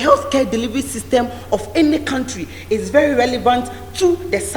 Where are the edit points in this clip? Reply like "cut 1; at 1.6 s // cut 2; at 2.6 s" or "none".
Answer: none